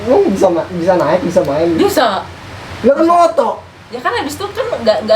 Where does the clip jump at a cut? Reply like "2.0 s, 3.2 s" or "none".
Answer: none